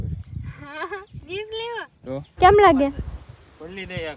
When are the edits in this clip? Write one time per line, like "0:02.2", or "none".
0:02.3